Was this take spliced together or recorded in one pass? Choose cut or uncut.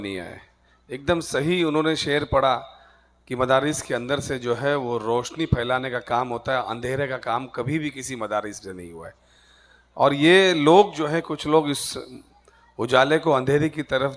uncut